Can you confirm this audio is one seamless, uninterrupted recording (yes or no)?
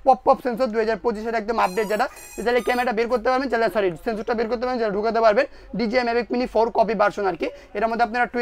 yes